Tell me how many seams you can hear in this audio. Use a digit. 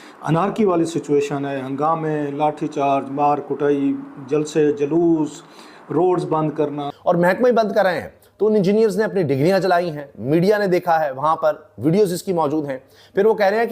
1